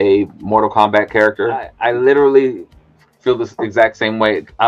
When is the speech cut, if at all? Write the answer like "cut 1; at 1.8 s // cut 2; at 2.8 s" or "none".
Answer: cut 1; at 1.7 s